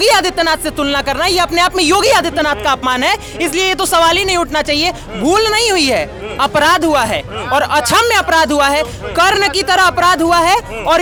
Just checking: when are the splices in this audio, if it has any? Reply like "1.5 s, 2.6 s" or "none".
none